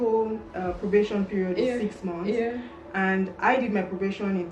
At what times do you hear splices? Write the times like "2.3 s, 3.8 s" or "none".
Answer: none